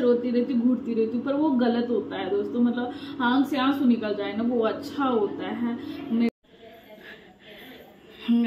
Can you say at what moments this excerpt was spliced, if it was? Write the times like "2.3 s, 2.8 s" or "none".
6.3 s